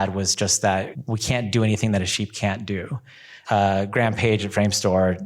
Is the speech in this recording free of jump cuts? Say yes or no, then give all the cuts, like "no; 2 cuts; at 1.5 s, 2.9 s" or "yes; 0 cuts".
no; 2 cuts; at 0.9 s, 3.3 s